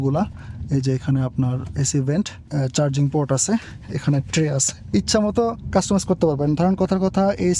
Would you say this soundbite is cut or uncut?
cut